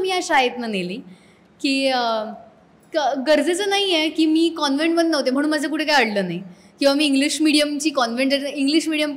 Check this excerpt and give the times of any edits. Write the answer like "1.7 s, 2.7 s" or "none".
none